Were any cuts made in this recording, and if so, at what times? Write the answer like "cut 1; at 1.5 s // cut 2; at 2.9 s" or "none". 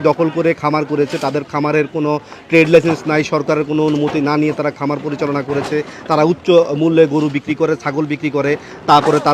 none